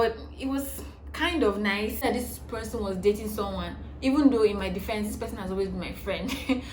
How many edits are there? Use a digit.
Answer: 1